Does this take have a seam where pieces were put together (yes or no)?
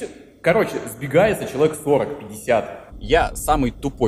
yes